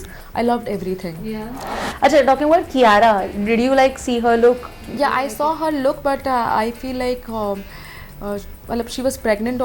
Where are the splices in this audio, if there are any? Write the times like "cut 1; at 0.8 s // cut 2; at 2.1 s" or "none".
cut 1; at 1.6 s

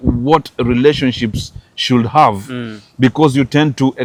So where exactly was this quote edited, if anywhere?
none

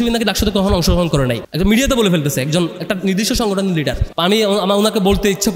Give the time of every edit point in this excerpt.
cut 1; at 1.4 s // cut 2; at 4.1 s

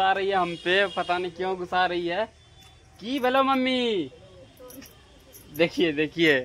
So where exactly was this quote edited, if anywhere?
none

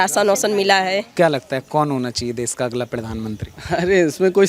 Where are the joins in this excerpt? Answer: cut 1; at 1.1 s

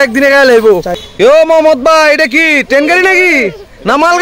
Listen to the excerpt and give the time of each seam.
cut 1; at 1.3 s

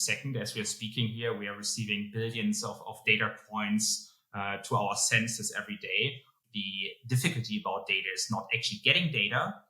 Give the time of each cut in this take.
cut 1; at 6.3 s

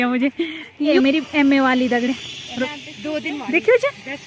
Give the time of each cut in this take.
cut 1; at 1.0 s // cut 2; at 2.7 s

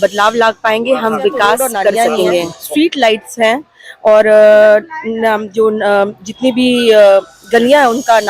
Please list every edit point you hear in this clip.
cut 1; at 2.6 s

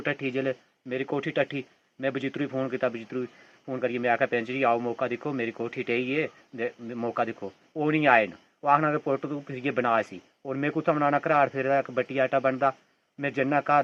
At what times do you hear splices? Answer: none

